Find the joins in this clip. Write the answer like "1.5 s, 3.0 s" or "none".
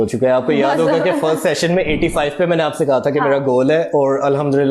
none